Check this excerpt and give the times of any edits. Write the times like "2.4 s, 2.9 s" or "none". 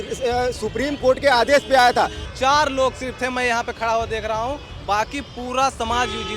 2.2 s